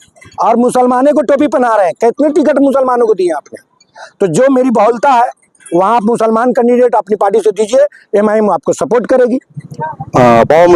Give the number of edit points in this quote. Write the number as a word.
zero